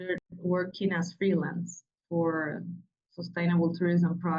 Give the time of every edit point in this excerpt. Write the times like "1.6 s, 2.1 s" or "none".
none